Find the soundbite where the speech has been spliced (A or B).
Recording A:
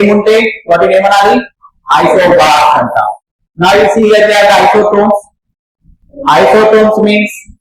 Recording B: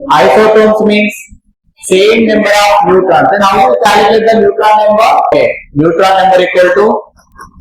B